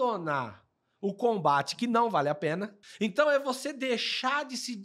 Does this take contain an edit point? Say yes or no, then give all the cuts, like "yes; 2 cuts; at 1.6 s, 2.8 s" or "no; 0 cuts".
yes; 1 cut; at 2.8 s